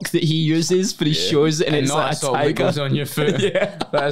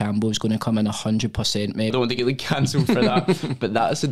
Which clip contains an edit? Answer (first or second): second